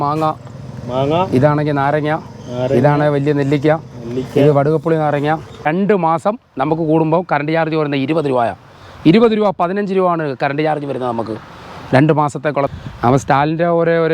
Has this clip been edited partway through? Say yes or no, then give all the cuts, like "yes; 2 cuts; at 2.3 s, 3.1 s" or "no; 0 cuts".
yes; 2 cuts; at 5.6 s, 12.7 s